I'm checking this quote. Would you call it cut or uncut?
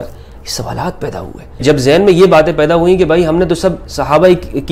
cut